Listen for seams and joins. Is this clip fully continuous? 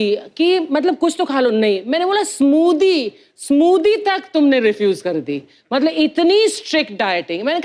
yes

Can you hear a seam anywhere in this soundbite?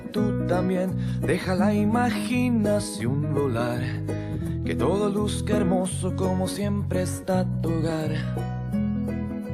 no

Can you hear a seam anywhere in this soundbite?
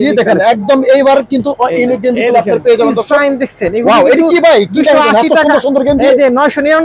no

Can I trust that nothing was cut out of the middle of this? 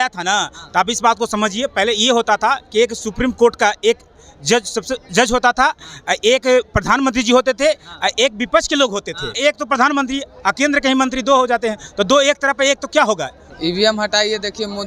no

